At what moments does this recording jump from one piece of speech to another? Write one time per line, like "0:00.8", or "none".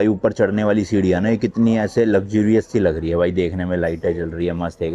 none